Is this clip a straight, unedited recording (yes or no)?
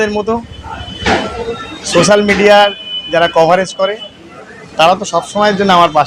yes